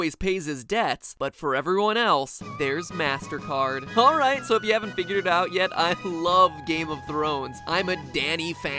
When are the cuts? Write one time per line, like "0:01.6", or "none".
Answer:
0:04.9

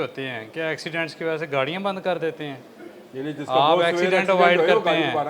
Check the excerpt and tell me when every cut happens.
none

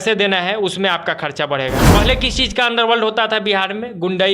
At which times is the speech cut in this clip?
0:01.9

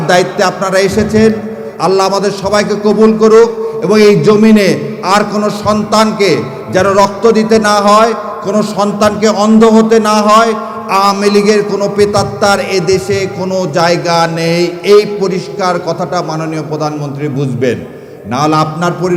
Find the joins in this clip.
none

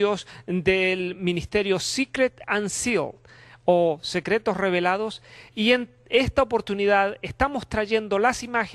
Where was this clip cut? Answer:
0:05.1

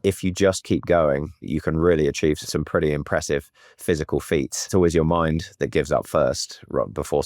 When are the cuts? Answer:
0:01.5
0:02.4
0:04.7

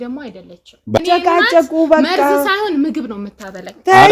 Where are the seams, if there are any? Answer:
0:01.0

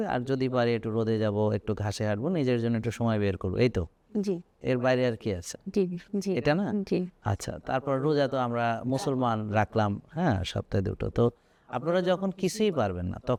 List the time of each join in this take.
none

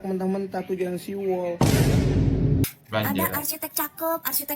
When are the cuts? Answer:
0:02.7

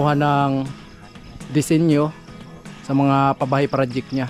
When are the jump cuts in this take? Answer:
none

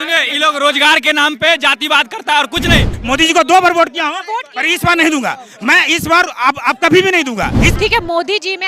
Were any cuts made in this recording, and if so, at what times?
0:02.9
0:07.7

